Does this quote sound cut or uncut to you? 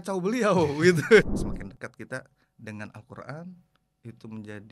cut